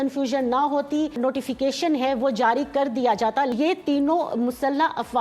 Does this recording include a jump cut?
yes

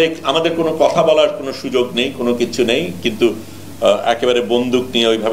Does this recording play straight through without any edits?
yes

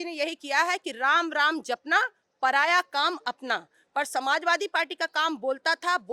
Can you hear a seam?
no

